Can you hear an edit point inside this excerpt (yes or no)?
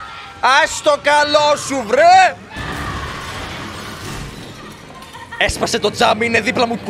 yes